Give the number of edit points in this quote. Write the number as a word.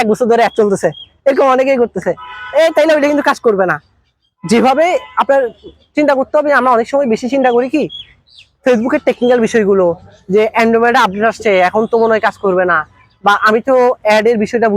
zero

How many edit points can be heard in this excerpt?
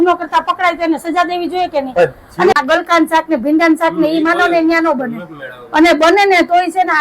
one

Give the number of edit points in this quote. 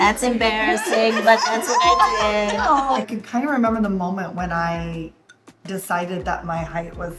one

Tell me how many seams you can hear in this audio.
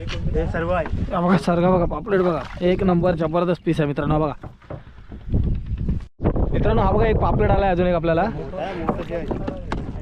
one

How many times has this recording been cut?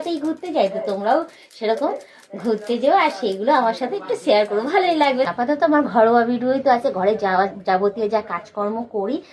one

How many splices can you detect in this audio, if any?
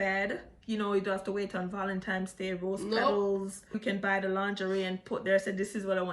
one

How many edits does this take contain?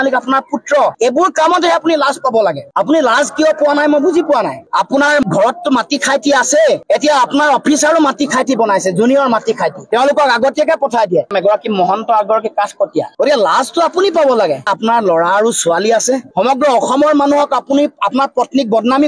three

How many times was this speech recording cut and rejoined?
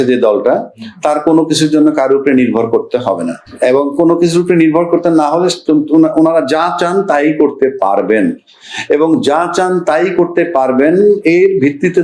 zero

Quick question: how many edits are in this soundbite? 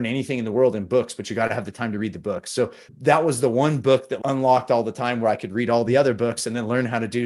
two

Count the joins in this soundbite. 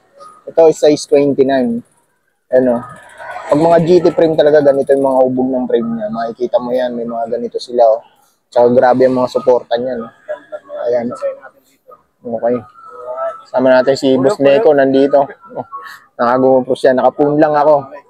zero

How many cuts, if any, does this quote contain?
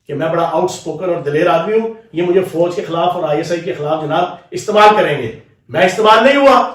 zero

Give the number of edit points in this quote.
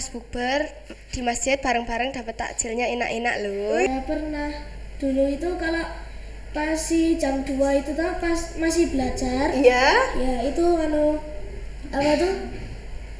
one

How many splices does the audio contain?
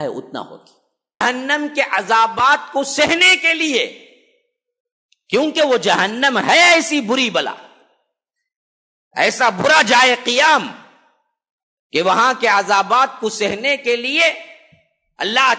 one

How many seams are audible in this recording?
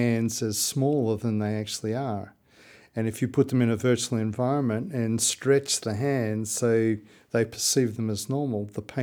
zero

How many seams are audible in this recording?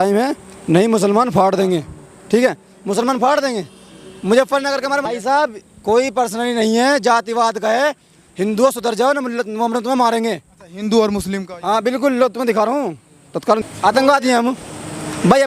two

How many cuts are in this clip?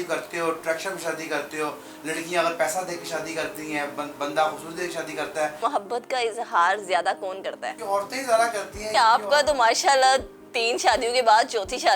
two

